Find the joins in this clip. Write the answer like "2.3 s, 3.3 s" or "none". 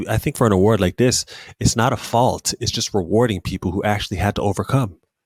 none